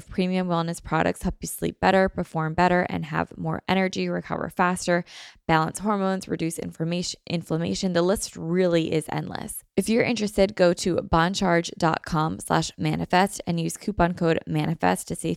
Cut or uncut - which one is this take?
cut